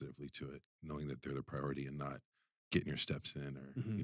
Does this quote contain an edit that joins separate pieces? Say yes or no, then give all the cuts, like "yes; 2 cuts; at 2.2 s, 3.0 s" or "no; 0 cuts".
no; 0 cuts